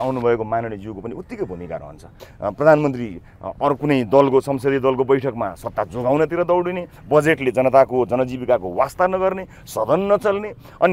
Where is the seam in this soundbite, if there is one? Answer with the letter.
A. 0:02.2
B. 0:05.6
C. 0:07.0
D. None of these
A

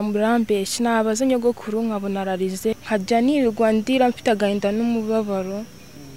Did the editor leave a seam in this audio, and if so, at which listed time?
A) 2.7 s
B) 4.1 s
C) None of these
A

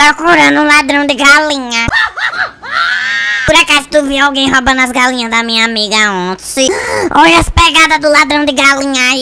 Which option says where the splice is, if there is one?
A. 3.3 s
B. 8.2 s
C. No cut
A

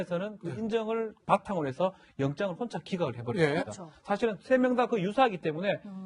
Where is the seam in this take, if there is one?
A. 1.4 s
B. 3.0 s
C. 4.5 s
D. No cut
A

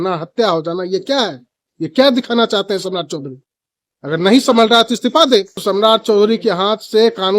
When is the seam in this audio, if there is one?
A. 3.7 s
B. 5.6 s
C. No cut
B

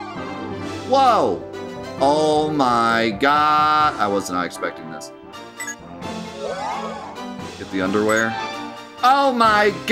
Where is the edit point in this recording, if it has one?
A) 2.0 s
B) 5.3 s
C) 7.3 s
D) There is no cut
B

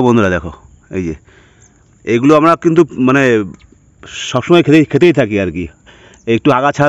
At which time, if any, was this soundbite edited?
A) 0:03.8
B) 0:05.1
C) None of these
C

